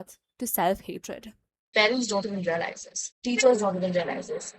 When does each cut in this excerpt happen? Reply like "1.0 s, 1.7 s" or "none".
1.7 s